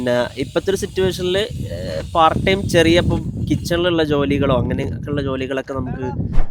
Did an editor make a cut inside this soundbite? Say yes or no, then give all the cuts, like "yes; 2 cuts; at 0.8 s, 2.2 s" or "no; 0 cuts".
no; 0 cuts